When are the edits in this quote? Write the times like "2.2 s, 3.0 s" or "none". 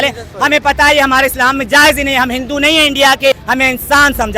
3.4 s